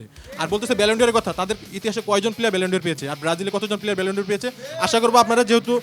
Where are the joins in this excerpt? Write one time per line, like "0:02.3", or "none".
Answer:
none